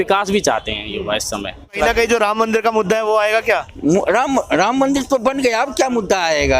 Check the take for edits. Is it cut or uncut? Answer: cut